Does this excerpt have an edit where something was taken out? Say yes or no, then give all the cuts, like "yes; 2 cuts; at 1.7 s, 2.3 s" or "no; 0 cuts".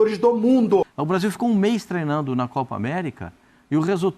yes; 1 cut; at 1.0 s